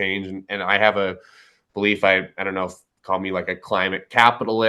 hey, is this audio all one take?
yes; 0 cuts

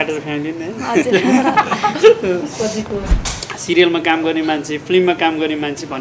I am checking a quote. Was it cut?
yes; 1 cut; at 3.1 s

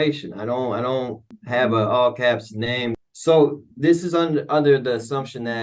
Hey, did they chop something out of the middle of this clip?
yes; 2 cuts; at 1.3 s, 3.0 s

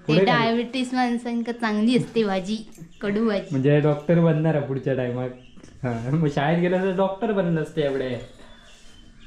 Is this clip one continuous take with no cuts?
yes; 0 cuts

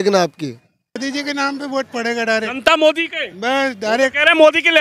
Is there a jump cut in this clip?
yes; 1 cut; at 1.0 s

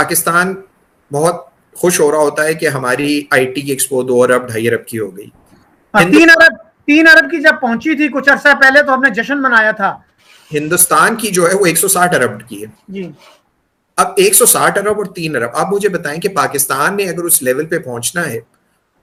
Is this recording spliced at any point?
no; 0 cuts

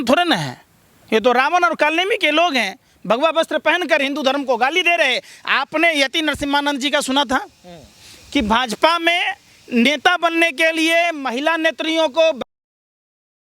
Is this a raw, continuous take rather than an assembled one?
yes; 0 cuts

